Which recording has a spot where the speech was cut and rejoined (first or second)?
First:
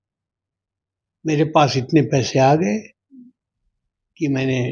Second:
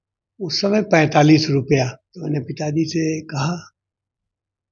second